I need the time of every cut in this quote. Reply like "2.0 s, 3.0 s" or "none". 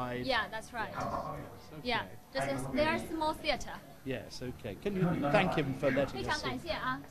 1.8 s